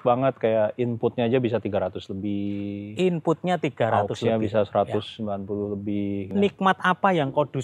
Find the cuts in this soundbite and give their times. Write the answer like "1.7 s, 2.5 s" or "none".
6.3 s